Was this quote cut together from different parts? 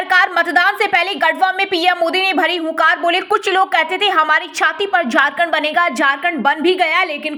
no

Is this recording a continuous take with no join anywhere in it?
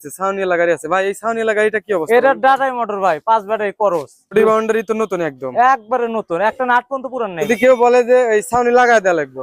no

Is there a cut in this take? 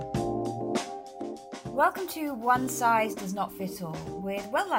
yes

